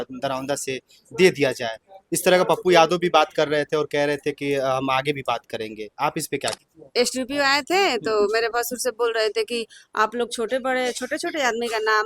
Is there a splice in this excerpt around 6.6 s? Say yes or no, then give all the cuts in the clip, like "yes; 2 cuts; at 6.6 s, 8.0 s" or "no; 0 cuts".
yes; 1 cut; at 6.6 s